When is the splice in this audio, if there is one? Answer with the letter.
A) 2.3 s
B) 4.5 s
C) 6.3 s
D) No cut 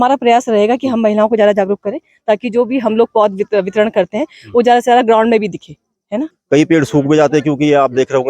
C